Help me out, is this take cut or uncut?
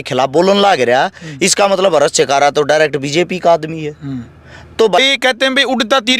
cut